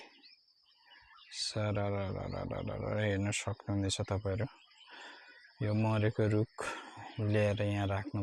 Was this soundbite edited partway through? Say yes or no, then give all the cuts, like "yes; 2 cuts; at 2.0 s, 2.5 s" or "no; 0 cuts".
no; 0 cuts